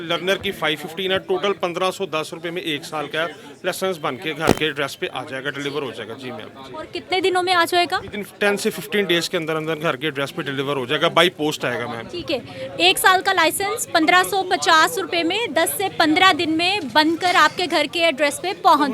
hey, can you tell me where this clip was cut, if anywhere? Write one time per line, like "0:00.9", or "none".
none